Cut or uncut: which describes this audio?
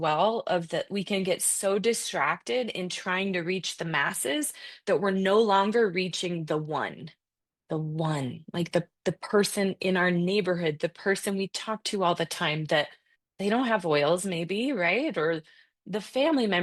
uncut